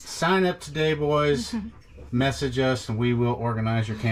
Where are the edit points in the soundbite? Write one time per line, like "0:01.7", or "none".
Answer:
none

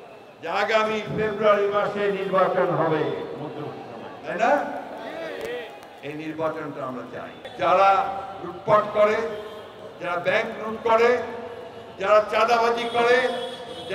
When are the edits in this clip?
0:07.5

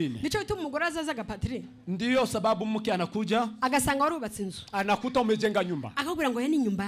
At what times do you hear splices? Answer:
none

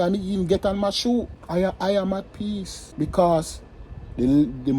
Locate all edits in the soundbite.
0:01.4
0:02.8

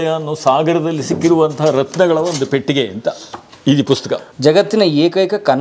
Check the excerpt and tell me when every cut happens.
0:04.3

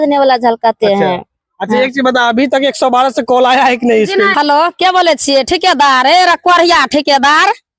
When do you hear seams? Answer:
0:04.3

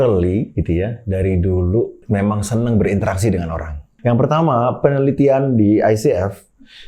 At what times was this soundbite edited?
0:02.0
0:03.8

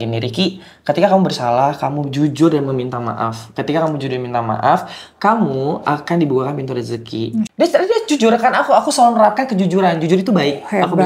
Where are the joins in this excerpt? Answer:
0:07.4

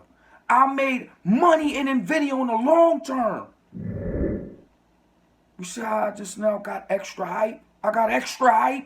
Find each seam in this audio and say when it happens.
0:03.6
0:04.5

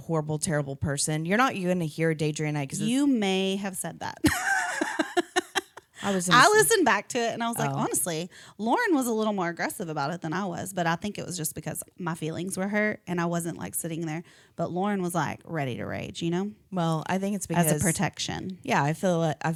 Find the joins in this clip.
none

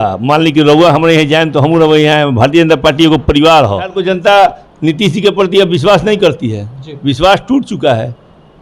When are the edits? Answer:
0:04.0

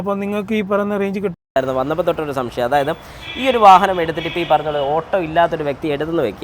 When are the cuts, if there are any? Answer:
0:01.6

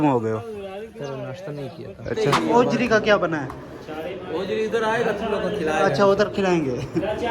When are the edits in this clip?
0:02.0

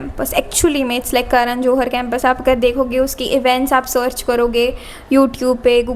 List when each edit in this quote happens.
none

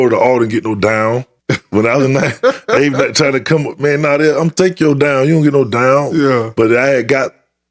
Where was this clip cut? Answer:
0:01.3

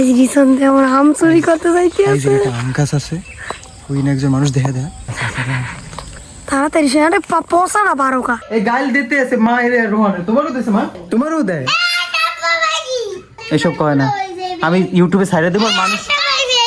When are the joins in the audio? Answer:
0:05.0
0:06.1
0:08.4
0:11.0

